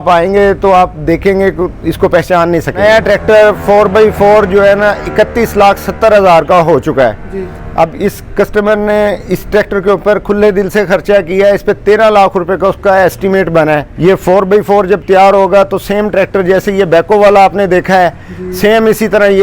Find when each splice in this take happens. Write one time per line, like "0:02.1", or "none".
0:02.8
0:13.9